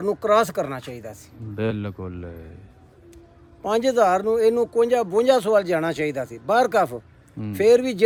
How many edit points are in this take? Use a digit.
0